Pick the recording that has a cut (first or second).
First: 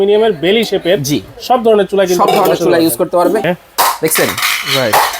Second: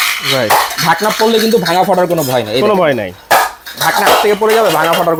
first